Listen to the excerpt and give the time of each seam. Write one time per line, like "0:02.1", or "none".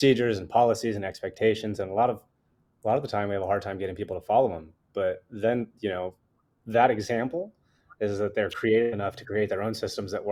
none